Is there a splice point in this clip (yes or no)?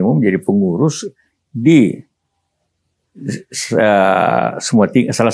no